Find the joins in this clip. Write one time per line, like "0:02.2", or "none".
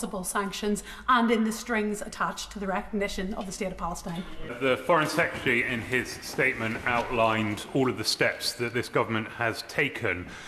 0:04.5